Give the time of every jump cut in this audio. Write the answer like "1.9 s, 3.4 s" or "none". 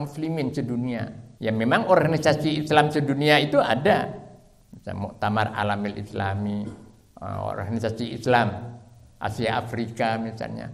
1.2 s